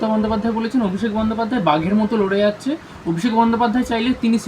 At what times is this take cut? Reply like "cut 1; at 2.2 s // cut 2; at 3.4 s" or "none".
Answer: none

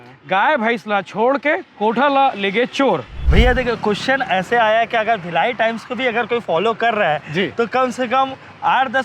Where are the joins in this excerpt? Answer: cut 1; at 3.2 s

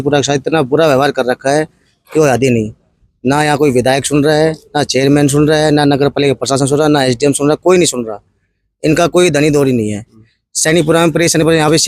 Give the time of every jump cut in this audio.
none

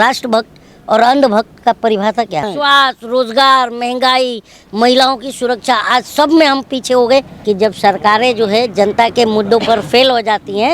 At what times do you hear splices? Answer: cut 1; at 2.5 s // cut 2; at 7.3 s

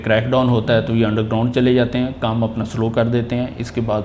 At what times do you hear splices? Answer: none

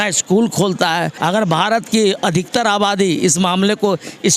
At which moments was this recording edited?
cut 1; at 1.1 s

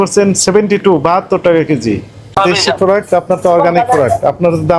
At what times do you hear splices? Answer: cut 1; at 2.4 s

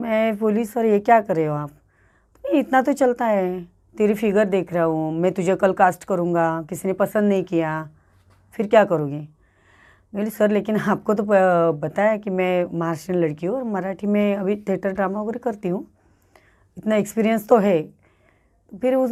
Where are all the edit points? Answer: none

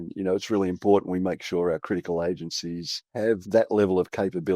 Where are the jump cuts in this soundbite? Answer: cut 1; at 3.4 s

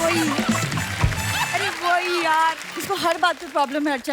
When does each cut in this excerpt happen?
cut 1; at 2.7 s

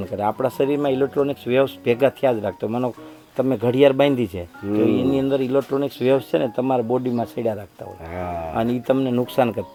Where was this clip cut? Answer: none

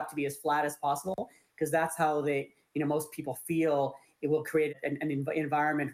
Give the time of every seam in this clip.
none

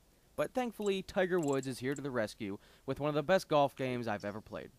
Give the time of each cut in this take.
cut 1; at 1.9 s

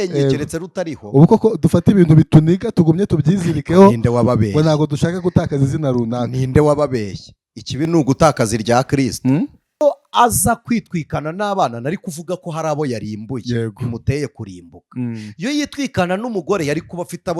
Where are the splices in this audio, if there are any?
cut 1; at 9.8 s

